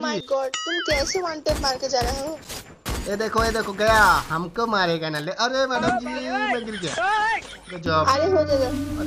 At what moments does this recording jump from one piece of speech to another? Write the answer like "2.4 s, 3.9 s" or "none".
2.6 s